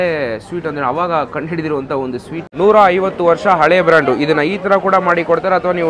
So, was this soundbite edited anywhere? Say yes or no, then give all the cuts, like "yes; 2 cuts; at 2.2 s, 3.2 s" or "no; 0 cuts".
yes; 1 cut; at 2.4 s